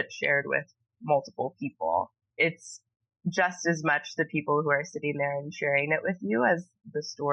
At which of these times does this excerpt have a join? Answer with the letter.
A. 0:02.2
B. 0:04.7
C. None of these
A